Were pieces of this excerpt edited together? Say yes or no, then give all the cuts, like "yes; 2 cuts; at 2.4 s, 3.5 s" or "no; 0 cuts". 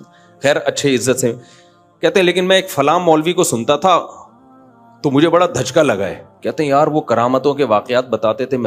yes; 1 cut; at 6.3 s